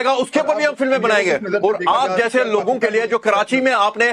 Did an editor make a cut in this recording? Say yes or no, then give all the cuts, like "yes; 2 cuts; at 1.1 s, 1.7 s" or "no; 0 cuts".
no; 0 cuts